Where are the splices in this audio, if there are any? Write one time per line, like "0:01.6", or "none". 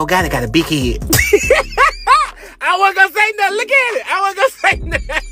none